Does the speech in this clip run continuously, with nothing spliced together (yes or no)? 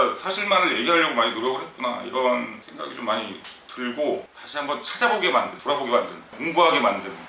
no